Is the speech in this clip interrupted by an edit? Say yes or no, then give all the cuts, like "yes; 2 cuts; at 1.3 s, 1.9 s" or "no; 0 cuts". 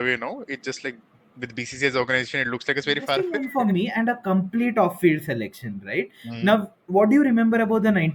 yes; 1 cut; at 3.4 s